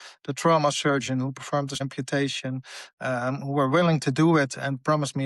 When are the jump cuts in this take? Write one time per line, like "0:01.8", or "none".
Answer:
0:01.8